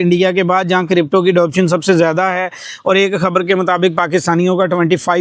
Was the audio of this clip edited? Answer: no; 0 cuts

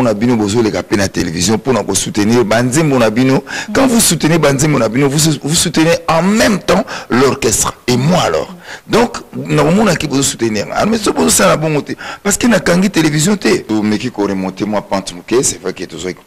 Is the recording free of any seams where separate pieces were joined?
no; 1 cut; at 13.6 s

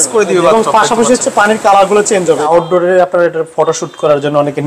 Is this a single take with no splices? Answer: no; 1 cut; at 2.5 s

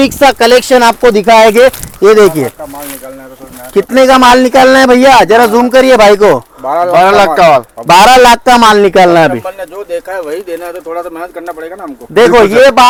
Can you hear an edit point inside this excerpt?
no; 0 cuts

